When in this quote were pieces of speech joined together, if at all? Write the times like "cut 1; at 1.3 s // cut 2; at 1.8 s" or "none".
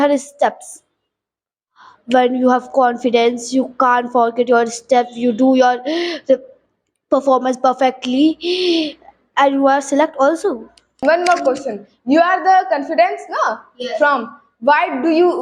cut 1; at 11.0 s